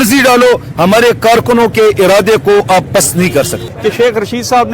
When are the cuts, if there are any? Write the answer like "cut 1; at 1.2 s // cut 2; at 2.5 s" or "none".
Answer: cut 1; at 3.7 s

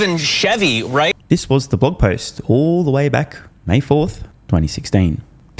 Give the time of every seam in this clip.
none

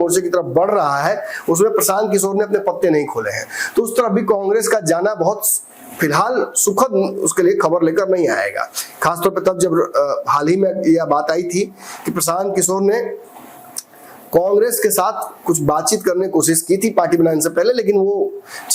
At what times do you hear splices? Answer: none

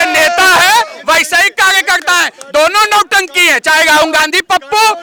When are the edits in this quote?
none

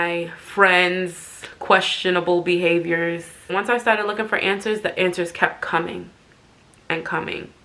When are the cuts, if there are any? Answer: cut 1; at 3.5 s

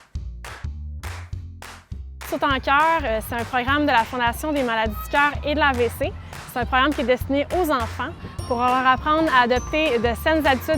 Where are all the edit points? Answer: cut 1; at 2.3 s

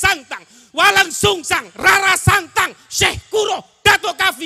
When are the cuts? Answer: none

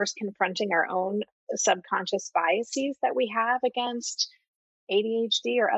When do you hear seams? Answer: none

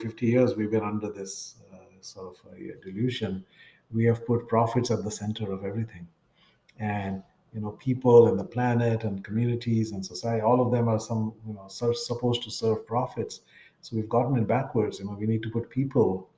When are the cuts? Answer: none

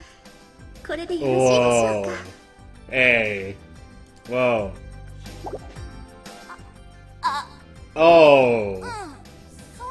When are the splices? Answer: none

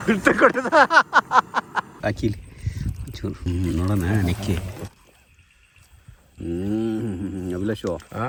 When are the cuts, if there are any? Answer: none

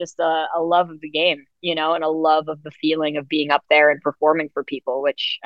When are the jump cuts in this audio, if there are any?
none

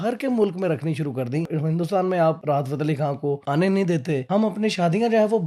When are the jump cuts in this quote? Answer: cut 1; at 1.5 s // cut 2; at 2.4 s // cut 3; at 3.4 s // cut 4; at 4.2 s

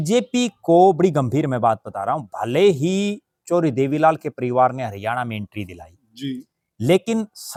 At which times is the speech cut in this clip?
none

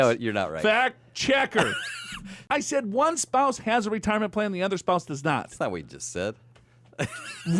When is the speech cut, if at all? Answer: cut 1; at 2.5 s

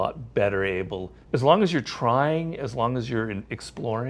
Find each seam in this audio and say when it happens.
cut 1; at 1.1 s

